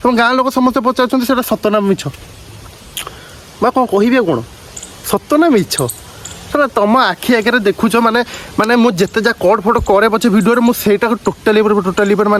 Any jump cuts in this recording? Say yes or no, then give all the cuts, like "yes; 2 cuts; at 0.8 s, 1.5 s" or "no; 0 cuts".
no; 0 cuts